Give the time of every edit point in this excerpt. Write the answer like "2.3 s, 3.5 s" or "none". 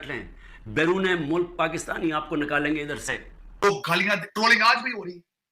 3.6 s